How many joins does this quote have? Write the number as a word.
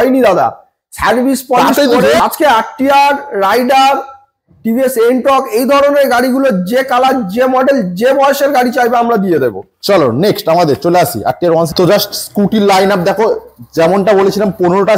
two